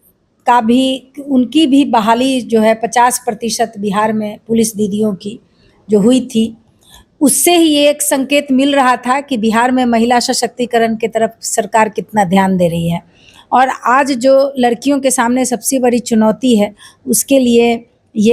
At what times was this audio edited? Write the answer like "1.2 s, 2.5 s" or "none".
none